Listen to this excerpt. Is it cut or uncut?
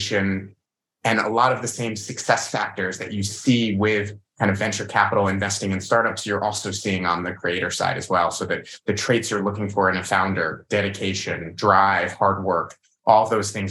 uncut